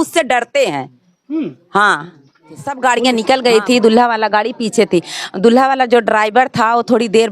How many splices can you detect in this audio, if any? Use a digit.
1